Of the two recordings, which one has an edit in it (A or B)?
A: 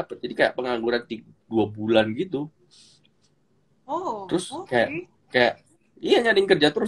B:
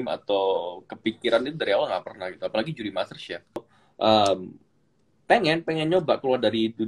B